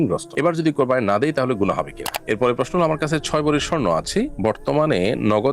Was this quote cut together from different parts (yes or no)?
yes